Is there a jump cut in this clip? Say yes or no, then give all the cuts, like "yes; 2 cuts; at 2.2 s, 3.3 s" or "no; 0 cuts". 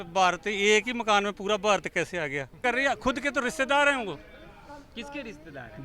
yes; 1 cut; at 2.6 s